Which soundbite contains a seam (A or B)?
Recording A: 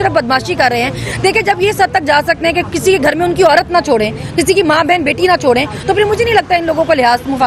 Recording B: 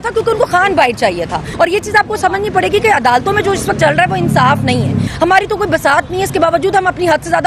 B